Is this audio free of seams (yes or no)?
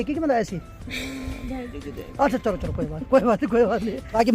yes